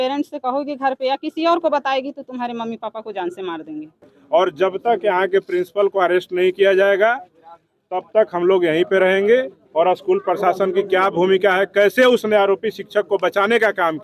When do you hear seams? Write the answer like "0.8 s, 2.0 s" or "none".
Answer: 4.0 s